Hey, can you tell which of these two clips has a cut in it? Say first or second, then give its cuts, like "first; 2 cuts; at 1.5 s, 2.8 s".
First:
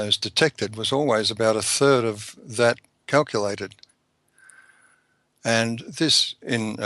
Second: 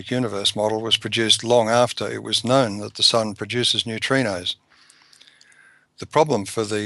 second; 1 cut; at 4.5 s